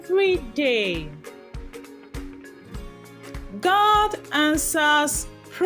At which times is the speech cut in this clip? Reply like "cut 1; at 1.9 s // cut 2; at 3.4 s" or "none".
cut 1; at 1.1 s // cut 2; at 3.5 s